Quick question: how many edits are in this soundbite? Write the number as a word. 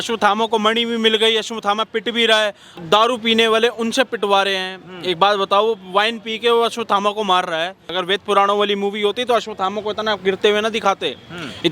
two